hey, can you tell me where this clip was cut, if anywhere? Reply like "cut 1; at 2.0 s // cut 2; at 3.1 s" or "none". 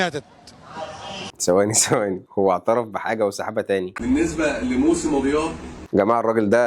cut 1; at 3.9 s